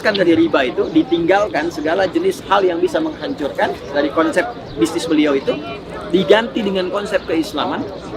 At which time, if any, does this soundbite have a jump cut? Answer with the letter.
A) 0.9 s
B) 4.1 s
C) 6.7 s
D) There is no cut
D